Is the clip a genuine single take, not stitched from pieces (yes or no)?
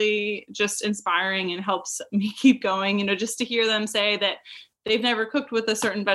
yes